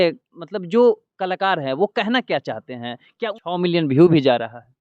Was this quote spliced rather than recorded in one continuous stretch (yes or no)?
yes